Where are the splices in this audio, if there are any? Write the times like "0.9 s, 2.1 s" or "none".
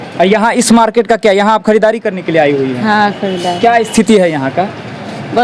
none